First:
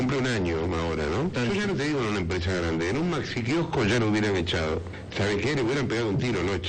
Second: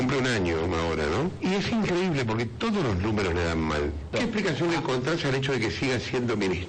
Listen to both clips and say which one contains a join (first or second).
first